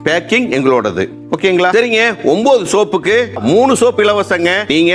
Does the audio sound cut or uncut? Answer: cut